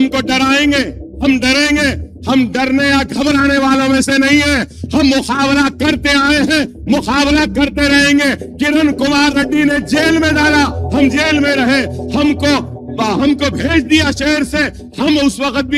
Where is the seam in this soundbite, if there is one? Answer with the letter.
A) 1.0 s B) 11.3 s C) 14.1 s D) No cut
A